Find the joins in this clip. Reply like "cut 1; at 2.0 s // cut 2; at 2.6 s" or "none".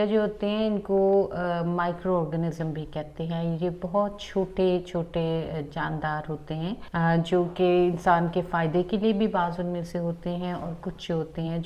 cut 1; at 6.8 s